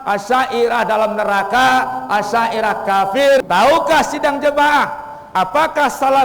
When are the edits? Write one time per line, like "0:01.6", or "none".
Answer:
0:03.4